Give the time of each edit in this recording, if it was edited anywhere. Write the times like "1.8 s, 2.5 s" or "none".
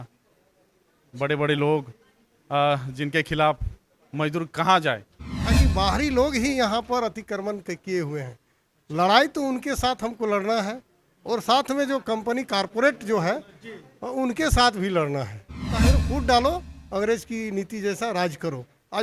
5.5 s, 15.7 s